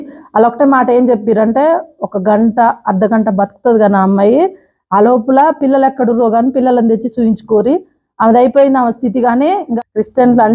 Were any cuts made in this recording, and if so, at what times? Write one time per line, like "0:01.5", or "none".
0:09.6